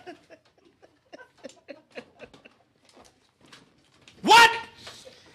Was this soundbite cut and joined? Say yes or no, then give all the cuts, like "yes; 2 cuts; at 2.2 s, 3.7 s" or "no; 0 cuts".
no; 0 cuts